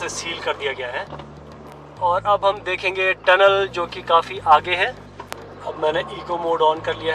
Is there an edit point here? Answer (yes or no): no